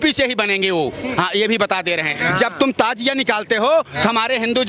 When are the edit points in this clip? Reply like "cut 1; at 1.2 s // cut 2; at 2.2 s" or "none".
cut 1; at 2.1 s